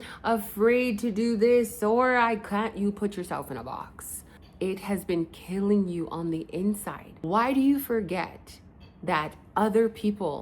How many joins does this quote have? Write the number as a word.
one